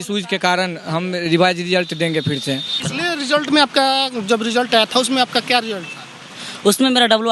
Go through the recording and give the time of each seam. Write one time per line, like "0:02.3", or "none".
0:02.7